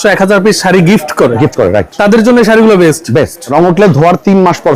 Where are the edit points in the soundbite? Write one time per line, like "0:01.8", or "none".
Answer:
0:03.5